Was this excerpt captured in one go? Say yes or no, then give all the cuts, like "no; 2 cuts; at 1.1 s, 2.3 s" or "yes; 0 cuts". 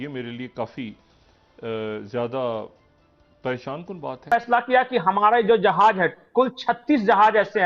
no; 1 cut; at 4.3 s